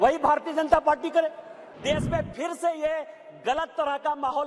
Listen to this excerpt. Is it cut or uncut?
cut